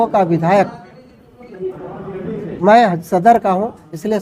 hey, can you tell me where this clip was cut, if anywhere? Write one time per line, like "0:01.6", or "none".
none